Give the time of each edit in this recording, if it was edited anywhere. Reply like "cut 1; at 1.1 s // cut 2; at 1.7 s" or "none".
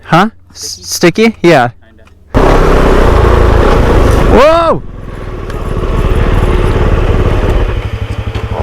cut 1; at 2.3 s